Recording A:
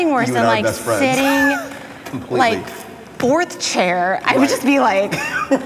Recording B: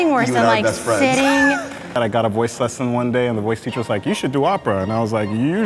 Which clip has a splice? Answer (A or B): B